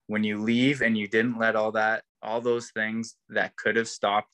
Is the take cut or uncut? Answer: cut